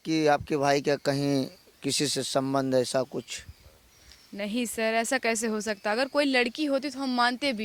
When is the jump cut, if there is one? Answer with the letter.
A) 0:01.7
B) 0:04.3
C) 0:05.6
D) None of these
D